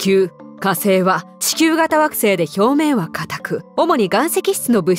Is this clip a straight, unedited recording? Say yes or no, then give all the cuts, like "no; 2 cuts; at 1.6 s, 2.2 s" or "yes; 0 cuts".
no; 2 cuts; at 1.4 s, 3.6 s